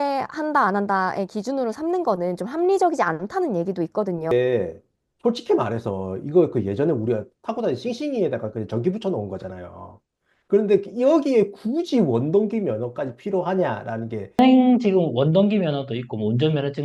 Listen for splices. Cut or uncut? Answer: cut